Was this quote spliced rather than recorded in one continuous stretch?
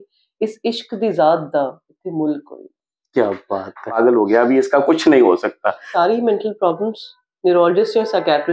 yes; 2 cuts; at 3.9 s, 5.8 s

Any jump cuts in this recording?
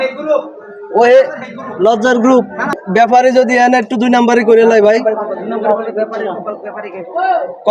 yes; 1 cut; at 2.7 s

